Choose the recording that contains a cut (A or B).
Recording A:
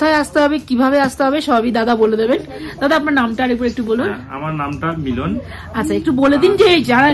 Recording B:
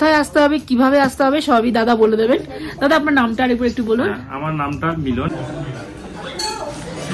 B